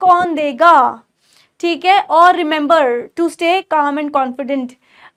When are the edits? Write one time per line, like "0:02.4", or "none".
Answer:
none